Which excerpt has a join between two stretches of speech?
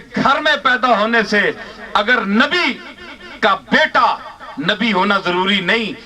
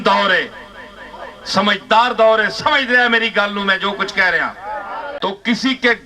second; 1 cut; at 5.0 s

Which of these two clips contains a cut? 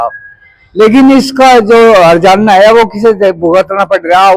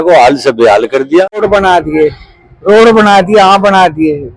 second; 1 cut; at 1.4 s

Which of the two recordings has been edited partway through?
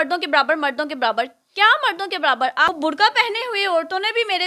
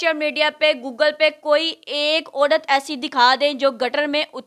first; 1 cut; at 2.7 s

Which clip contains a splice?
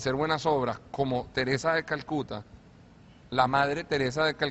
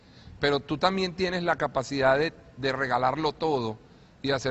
second; 1 cut; at 2.6 s

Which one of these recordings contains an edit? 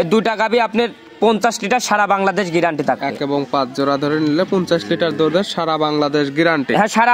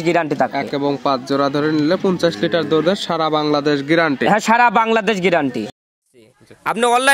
second; 1 cut; at 5.9 s

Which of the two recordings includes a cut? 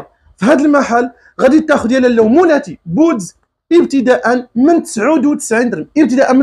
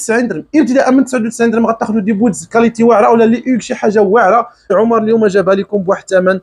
second; 1 cut; at 4.7 s

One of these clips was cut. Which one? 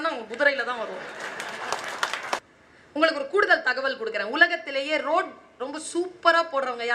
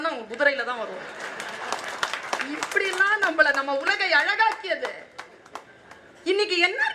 first; 1 cut; at 2.4 s

